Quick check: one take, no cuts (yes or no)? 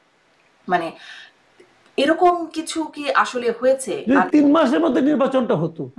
no